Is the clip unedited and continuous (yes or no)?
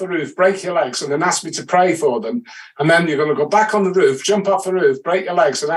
yes